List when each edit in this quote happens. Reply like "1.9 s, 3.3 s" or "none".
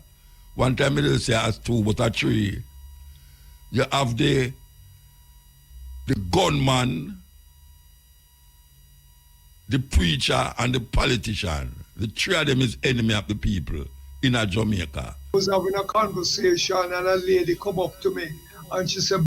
15.3 s